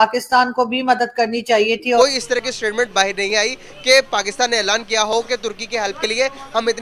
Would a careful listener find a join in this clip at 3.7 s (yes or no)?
no